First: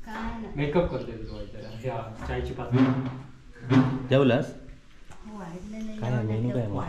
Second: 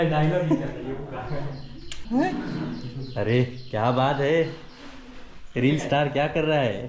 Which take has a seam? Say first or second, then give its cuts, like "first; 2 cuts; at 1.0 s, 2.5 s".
second; 1 cut; at 1.9 s